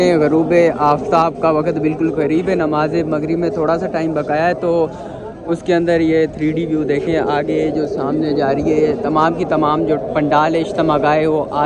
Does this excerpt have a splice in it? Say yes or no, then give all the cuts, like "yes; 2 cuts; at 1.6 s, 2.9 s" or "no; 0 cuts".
no; 0 cuts